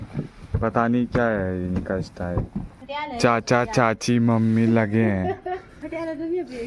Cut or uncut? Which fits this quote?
cut